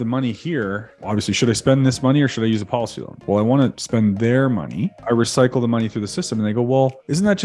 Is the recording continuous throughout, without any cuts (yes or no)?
no